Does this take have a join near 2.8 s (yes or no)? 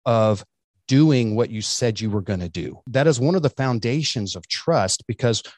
yes